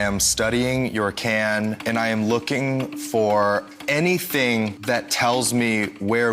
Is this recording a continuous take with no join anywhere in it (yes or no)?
no